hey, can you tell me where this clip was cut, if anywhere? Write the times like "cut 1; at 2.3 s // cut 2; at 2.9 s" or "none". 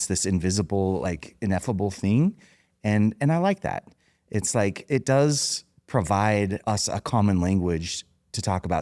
cut 1; at 6.6 s